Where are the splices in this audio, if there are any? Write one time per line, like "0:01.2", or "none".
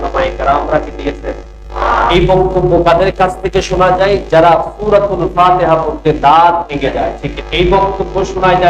0:02.1
0:07.3